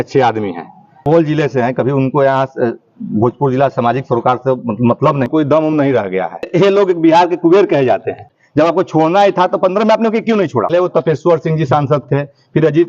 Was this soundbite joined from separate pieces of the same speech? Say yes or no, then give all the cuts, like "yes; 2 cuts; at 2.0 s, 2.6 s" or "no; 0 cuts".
yes; 5 cuts; at 1.0 s, 5.3 s, 6.5 s, 8.4 s, 10.7 s